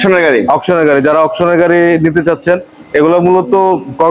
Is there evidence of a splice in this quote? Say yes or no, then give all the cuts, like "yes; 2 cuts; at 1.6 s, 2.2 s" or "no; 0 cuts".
no; 0 cuts